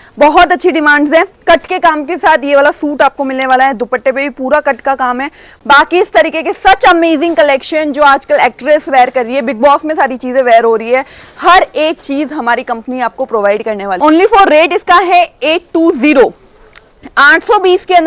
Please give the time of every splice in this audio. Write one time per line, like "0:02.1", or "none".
0:05.4
0:13.9